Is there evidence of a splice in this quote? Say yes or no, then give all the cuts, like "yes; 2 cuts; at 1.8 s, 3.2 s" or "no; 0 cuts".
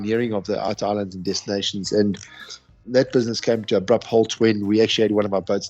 yes; 2 cuts; at 0.7 s, 2.8 s